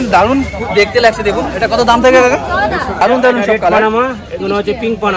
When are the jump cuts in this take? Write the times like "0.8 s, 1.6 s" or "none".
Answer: 3.0 s